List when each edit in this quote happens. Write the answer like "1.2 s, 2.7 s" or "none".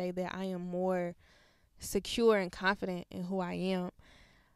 none